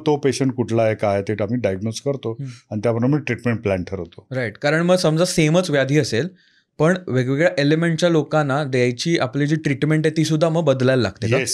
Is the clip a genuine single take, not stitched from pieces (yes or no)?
yes